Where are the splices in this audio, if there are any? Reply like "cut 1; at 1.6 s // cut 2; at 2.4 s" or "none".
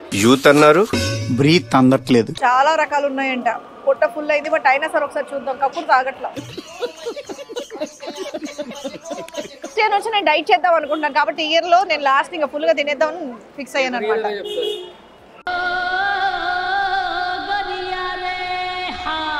cut 1; at 2.3 s // cut 2; at 9.7 s

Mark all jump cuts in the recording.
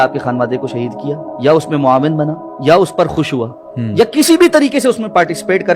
cut 1; at 1.3 s // cut 2; at 2.5 s

